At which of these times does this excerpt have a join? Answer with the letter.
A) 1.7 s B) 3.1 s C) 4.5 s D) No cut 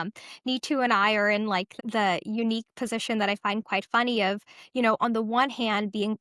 A